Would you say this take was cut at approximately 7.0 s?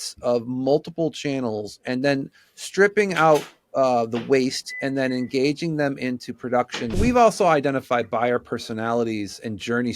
yes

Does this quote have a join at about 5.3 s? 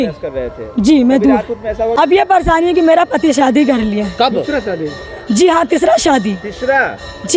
no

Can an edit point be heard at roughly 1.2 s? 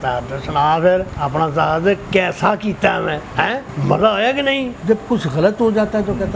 yes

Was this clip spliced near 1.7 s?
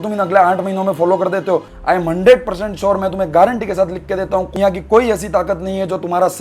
yes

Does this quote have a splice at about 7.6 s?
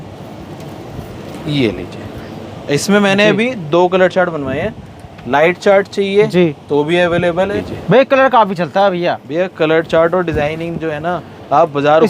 yes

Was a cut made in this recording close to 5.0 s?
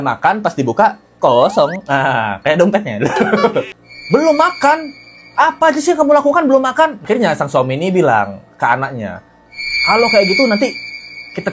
no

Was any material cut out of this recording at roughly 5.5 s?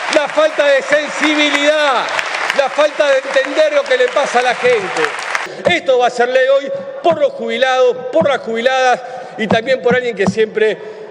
yes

